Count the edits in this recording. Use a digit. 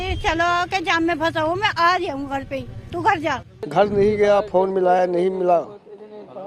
1